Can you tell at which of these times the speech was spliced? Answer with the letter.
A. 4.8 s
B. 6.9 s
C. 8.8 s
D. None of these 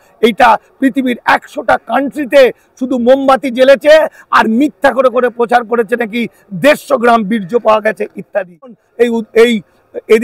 C